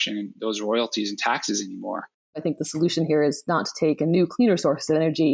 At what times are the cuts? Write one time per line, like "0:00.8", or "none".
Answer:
0:02.4